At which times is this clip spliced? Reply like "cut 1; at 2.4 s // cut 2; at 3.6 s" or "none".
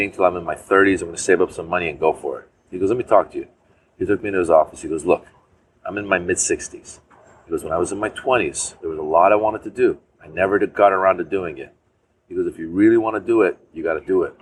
none